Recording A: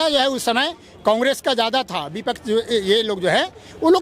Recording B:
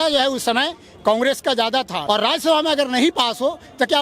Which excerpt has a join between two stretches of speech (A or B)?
B